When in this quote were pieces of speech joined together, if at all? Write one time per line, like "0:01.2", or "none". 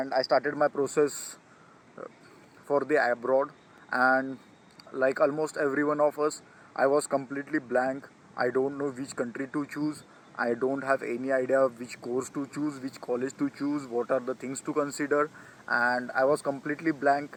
none